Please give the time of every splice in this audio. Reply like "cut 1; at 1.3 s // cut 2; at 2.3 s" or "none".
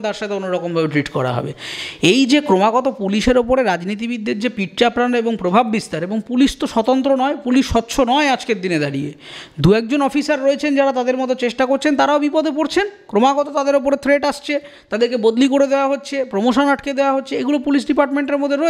none

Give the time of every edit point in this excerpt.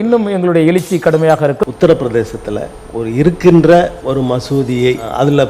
cut 1; at 1.6 s // cut 2; at 4.0 s

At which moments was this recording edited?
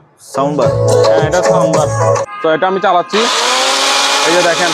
cut 1; at 2.2 s

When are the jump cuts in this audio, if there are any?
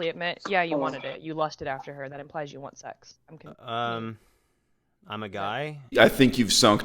cut 1; at 5.8 s

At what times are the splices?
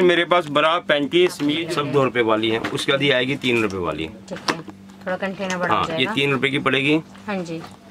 cut 1; at 1.6 s

